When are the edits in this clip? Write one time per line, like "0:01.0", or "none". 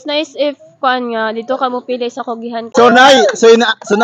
0:02.7